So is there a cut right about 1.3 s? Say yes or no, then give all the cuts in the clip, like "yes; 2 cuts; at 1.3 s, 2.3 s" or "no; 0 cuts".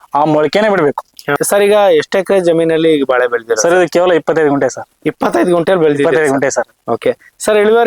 yes; 1 cut; at 1.3 s